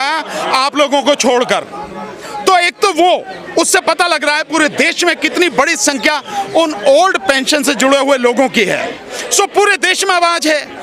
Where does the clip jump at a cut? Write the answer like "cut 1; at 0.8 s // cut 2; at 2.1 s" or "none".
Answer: none